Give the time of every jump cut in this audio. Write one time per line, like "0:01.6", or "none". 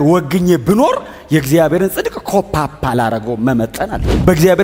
none